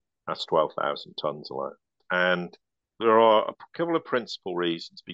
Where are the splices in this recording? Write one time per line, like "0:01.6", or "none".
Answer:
0:02.0